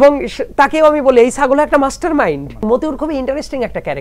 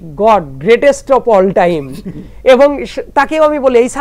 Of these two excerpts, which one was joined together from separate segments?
first; 1 cut; at 2.6 s

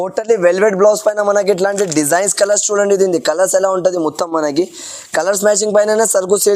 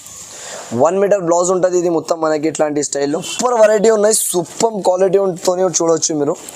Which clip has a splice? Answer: second; 1 cut; at 3.3 s

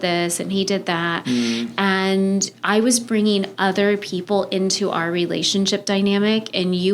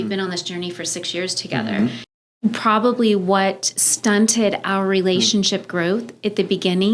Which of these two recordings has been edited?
second; 1 cut; at 2.1 s

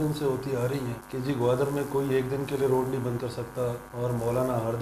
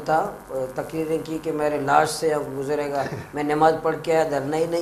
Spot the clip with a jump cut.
first; 2 cuts; at 1.0 s, 3.9 s

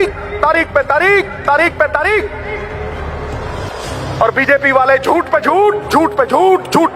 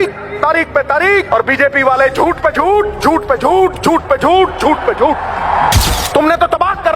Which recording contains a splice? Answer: second; 2 cuts; at 1.3 s, 5.8 s

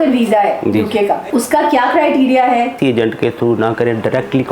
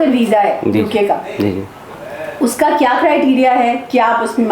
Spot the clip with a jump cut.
first; 2 cuts; at 1.2 s, 2.8 s

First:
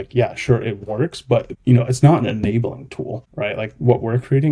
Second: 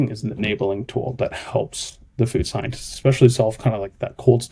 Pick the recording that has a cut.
first; 2 cuts; at 1.5 s, 3.2 s

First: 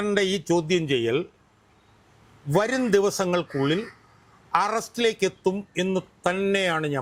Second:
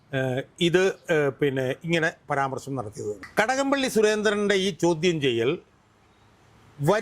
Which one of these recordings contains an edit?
second; 1 cut; at 3.2 s

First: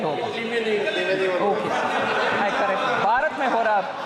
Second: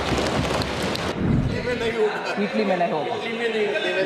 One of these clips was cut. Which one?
second; 1 cut; at 1.1 s

